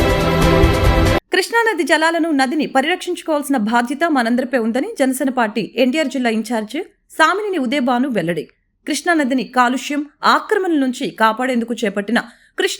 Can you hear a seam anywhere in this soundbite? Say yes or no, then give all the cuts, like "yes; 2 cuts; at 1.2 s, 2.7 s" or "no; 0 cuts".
yes; 1 cut; at 1.2 s